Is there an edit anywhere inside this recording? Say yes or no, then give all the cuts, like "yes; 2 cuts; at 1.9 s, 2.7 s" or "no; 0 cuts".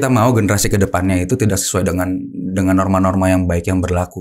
no; 0 cuts